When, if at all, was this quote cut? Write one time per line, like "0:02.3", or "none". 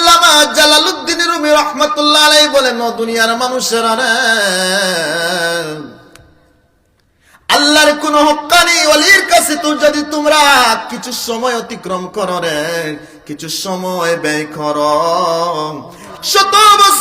0:16.1